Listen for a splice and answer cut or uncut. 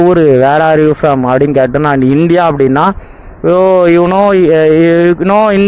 uncut